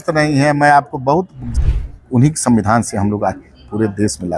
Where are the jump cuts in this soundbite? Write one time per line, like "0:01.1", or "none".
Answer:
0:01.4